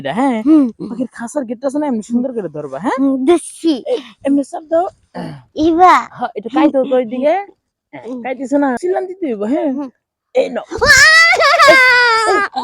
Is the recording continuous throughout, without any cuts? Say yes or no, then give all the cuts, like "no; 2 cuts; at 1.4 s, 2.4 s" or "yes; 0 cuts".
no; 1 cut; at 8.8 s